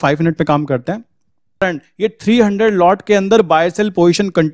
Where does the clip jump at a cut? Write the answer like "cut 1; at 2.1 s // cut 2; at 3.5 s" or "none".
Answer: cut 1; at 1.6 s